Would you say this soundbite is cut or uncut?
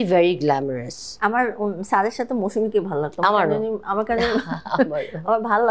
uncut